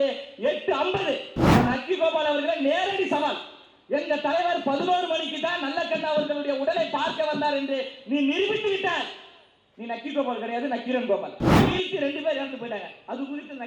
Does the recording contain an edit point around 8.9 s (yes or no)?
no